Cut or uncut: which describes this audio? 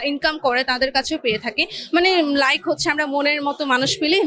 uncut